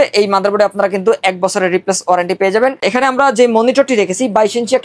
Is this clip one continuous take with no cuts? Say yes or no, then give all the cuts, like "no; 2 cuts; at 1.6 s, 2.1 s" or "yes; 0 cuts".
no; 1 cut; at 2.8 s